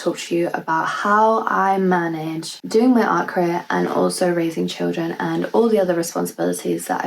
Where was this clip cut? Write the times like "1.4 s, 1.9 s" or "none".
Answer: 2.6 s